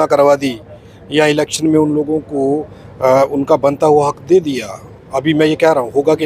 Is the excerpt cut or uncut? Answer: uncut